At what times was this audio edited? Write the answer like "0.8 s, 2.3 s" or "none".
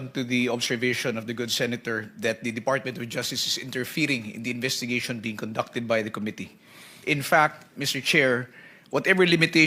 none